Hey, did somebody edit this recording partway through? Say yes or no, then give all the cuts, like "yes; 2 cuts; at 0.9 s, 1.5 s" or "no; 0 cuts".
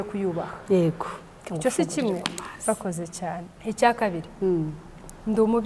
yes; 1 cut; at 3.5 s